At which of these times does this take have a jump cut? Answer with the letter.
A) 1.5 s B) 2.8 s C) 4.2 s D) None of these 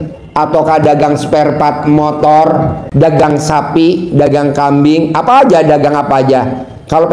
B